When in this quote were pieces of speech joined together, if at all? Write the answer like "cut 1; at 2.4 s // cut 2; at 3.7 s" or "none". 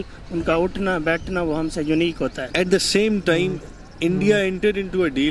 cut 1; at 2.4 s